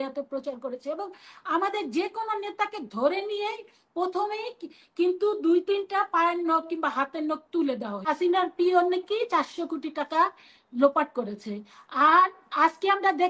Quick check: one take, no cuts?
no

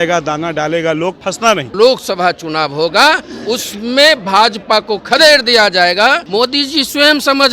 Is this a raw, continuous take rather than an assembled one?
no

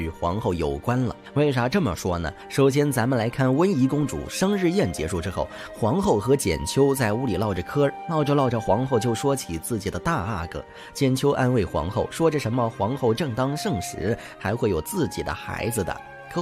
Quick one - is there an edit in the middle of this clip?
yes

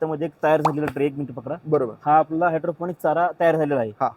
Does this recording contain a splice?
no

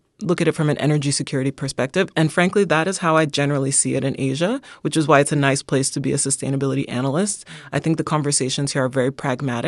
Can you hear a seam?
no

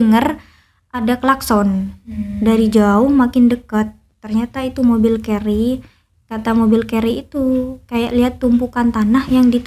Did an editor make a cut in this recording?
no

